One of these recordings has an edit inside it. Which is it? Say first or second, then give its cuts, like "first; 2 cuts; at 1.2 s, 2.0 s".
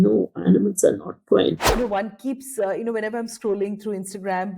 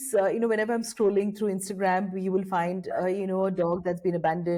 first; 1 cut; at 1.5 s